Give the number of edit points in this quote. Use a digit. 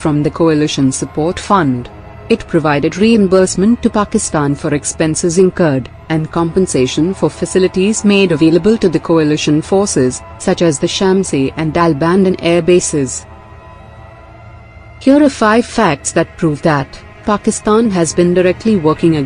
1